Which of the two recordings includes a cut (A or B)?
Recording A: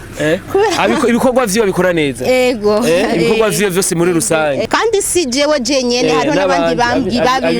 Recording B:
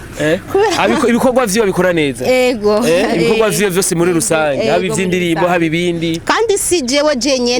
A